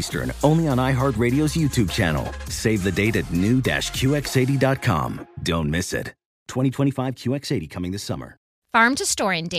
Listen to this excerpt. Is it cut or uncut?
cut